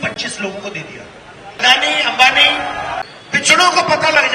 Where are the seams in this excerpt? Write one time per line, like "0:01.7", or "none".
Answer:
0:01.6
0:03.0